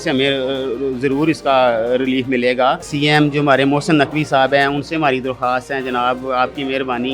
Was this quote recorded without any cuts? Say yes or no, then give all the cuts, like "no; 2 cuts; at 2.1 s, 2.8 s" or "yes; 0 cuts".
no; 1 cut; at 2.9 s